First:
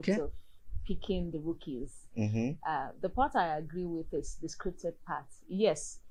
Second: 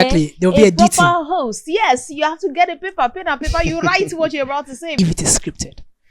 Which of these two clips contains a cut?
second; 1 cut; at 5.0 s

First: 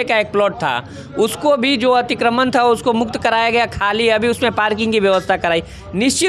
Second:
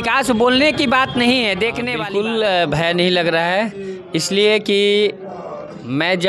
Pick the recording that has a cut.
second; 1 cut; at 1.9 s

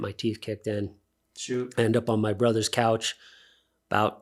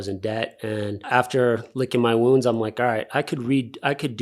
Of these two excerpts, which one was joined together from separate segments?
second; 1 cut; at 1.0 s

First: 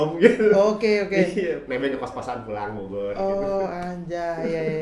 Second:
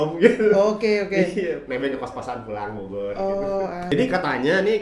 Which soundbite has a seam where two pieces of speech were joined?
second; 1 cut; at 3.9 s

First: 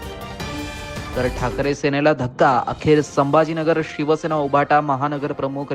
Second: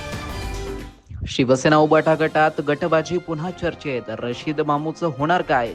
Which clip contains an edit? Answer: first; 1 cut; at 1.1 s

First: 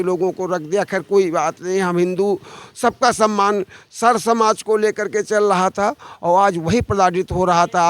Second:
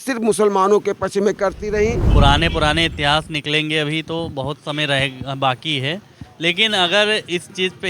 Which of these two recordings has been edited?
second; 1 cut; at 2.0 s

